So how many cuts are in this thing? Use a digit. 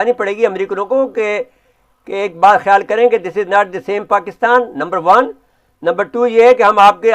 0